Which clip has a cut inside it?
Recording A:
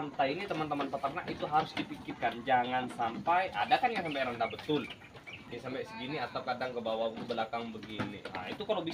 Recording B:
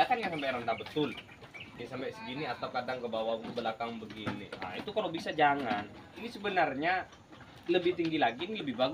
B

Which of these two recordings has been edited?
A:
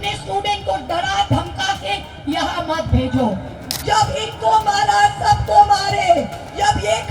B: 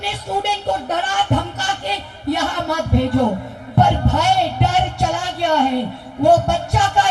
A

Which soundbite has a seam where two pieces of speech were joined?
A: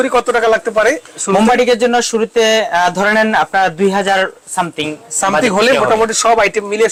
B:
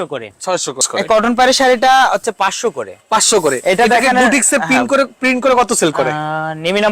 B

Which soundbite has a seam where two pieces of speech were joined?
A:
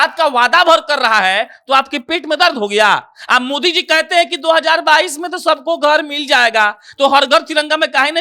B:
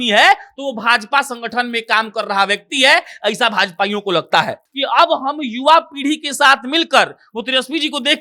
B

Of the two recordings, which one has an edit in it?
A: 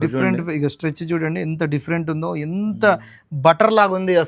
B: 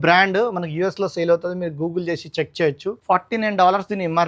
B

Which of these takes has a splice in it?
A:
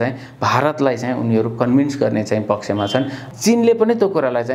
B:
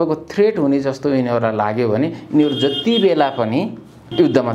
A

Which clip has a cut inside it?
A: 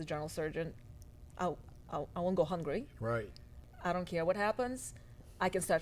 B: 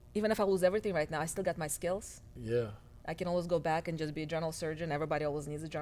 A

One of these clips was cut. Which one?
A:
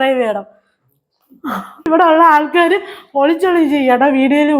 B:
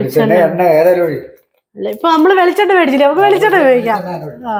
A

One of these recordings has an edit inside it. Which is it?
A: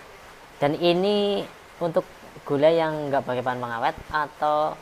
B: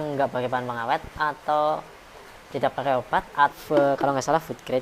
B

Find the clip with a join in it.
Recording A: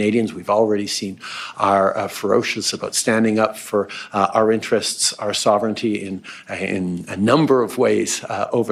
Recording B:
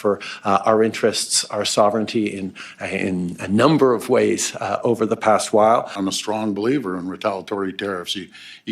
B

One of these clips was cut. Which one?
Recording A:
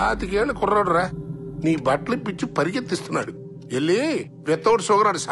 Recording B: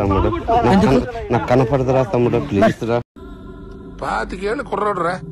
B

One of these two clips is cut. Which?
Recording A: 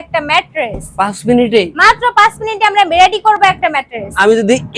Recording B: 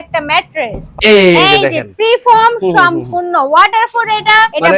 B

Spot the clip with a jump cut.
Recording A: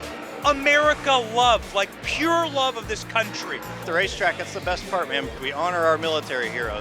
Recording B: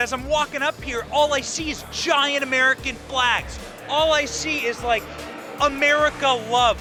A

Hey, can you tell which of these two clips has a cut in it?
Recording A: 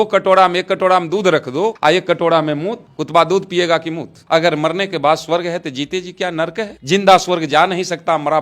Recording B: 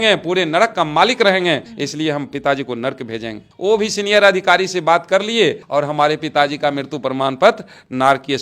A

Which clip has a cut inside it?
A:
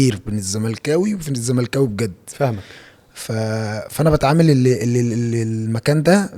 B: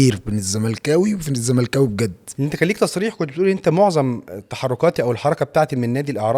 B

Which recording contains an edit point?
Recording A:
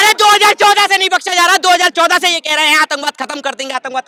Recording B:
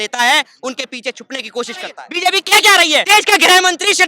B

